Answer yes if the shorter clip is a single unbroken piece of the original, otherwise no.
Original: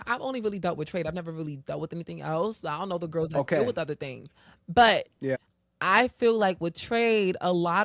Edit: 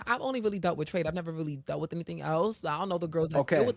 yes